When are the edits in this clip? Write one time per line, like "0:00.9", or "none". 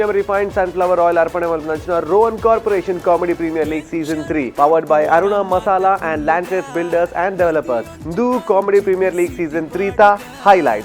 0:04.5
0:08.0